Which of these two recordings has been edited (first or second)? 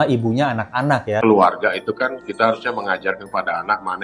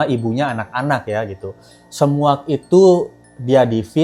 first